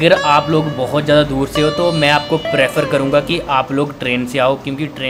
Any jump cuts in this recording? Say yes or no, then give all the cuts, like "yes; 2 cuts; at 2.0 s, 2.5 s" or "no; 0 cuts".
no; 0 cuts